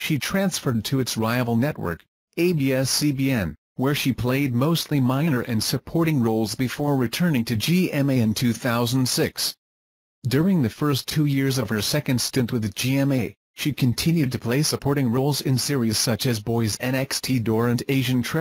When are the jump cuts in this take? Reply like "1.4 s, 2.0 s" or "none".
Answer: 11.1 s